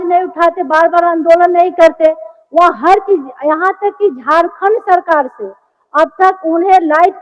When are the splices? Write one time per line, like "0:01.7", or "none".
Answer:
none